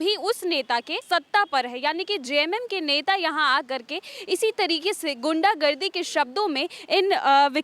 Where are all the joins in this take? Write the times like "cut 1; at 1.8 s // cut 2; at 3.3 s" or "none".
cut 1; at 1.0 s

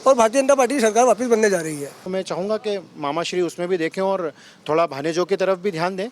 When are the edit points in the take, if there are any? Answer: cut 1; at 2.0 s

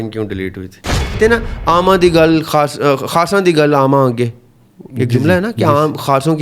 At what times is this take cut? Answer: cut 1; at 1.2 s

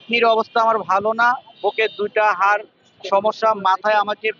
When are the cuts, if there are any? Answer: none

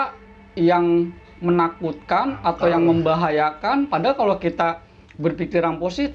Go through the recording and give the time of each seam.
none

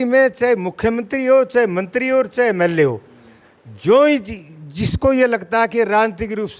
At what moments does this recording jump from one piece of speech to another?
none

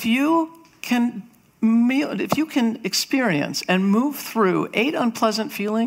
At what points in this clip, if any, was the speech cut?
none

